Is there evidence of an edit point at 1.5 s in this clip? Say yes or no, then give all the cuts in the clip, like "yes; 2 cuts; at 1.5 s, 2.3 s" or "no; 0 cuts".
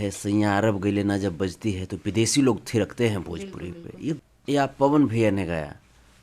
no; 1 cut; at 4.2 s